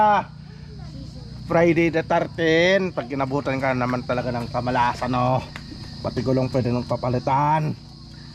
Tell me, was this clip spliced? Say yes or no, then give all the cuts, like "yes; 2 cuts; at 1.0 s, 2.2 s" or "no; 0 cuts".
no; 0 cuts